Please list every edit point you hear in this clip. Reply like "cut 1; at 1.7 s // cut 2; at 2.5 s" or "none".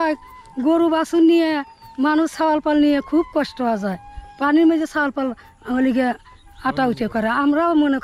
none